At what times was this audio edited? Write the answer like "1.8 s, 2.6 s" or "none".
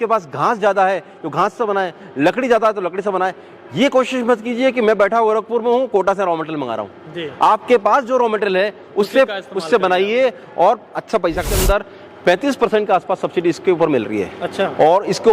11.5 s